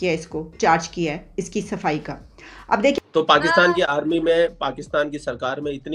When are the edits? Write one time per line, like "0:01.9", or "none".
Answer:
0:03.1